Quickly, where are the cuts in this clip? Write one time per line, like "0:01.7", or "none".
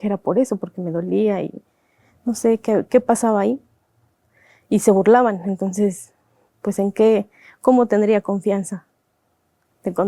none